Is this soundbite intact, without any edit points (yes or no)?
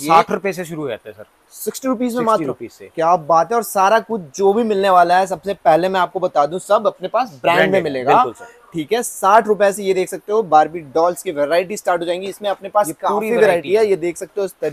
yes